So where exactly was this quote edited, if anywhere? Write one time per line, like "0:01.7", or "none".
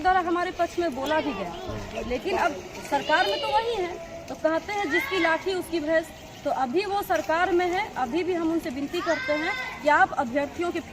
none